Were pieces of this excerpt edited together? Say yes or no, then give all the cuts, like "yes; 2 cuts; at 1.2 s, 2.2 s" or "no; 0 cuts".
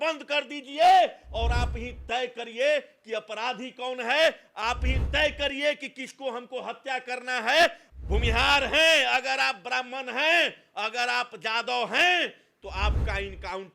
yes; 1 cut; at 7.9 s